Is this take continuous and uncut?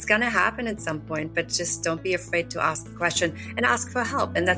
yes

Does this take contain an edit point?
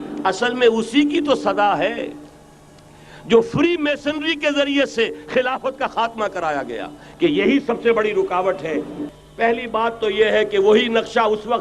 yes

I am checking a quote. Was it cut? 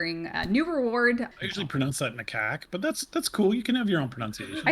yes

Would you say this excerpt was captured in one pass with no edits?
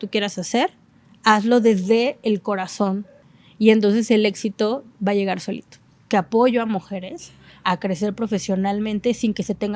no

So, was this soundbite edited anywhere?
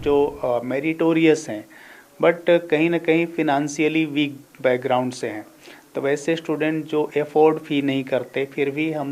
no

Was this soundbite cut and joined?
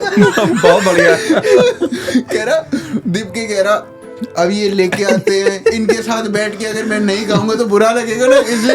no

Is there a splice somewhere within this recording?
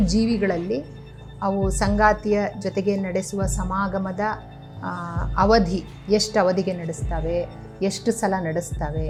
no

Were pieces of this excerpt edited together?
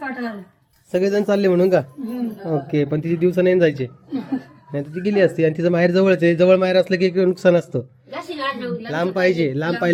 no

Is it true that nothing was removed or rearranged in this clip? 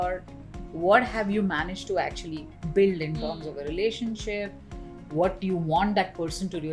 yes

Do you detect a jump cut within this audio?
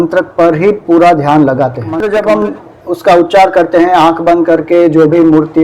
yes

